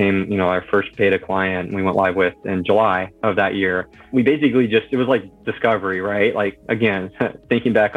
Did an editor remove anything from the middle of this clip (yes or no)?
yes